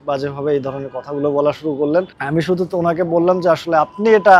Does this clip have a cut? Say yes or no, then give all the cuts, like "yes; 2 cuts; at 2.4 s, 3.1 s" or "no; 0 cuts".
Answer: yes; 1 cut; at 2.2 s